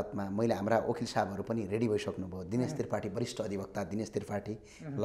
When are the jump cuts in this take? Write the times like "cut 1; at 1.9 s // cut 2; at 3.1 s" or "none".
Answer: none